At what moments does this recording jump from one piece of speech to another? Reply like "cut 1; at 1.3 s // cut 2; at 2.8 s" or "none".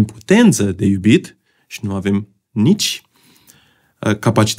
none